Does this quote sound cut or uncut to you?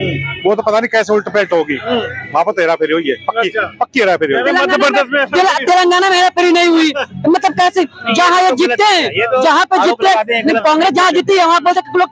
uncut